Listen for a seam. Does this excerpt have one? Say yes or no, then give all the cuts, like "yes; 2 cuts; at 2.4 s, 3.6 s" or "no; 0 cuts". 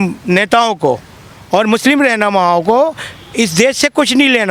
no; 0 cuts